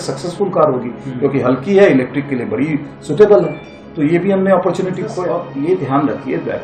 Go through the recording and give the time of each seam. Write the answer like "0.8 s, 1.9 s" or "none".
5.2 s

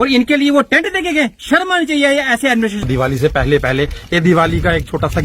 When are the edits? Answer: 2.9 s

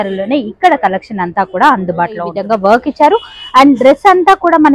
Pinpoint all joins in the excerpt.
2.4 s

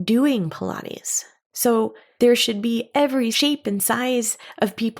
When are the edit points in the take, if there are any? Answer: 3.3 s

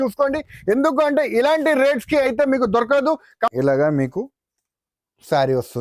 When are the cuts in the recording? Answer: 3.5 s

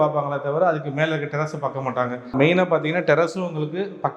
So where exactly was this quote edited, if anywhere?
2.3 s

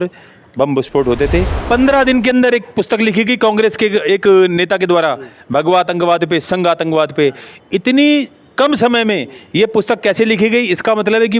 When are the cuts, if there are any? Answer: 1.5 s

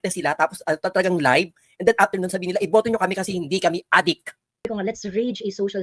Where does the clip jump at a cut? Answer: 4.7 s

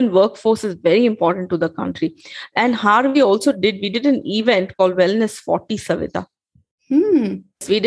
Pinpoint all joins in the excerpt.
none

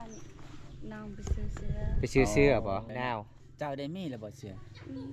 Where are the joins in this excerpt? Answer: 2.9 s

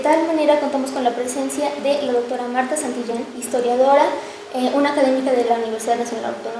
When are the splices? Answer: 3.2 s

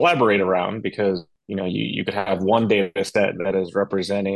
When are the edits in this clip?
1.4 s

